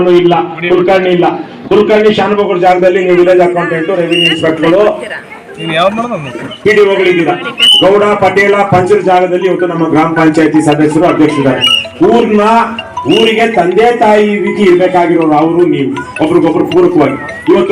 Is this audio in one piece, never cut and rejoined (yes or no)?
yes